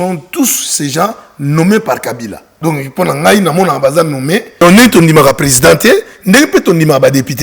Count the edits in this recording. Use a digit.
2